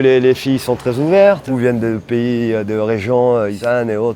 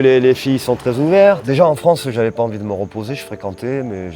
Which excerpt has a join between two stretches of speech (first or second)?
second